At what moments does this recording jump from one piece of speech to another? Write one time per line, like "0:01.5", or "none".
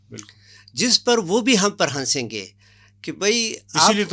none

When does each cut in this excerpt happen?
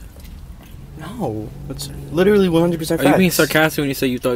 none

